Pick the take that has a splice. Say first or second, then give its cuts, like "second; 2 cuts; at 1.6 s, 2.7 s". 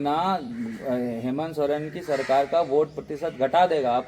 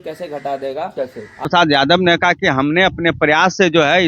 second; 1 cut; at 1.4 s